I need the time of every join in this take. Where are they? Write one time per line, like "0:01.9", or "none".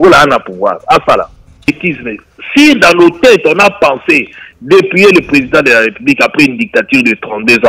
0:01.8